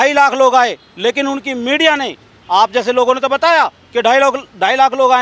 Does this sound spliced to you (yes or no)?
no